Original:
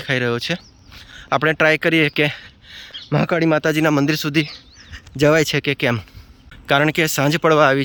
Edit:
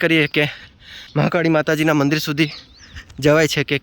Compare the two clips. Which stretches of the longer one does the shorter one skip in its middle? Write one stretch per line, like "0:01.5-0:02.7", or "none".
0:03.1-0:03.3